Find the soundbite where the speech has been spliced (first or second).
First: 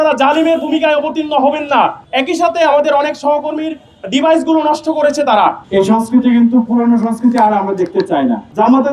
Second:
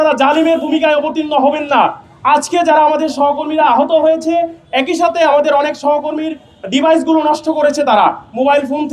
first